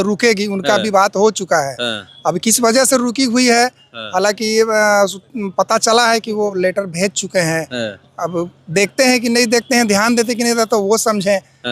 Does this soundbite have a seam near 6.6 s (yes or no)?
yes